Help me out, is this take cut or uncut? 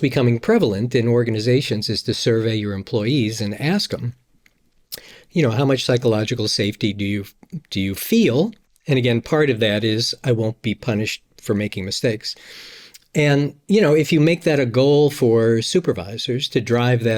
uncut